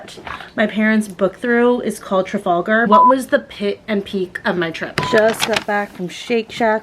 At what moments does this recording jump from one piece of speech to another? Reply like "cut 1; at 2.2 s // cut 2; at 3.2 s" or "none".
cut 1; at 2.9 s // cut 2; at 4.8 s